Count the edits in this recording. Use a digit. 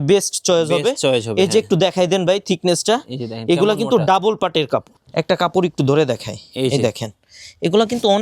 1